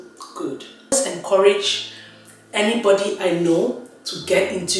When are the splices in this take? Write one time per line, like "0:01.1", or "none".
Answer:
0:00.9